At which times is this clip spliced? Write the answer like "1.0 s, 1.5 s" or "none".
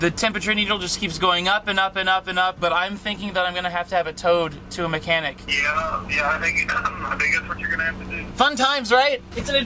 2.6 s, 5.4 s, 8.2 s